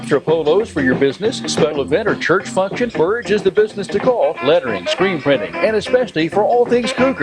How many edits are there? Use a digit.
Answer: 1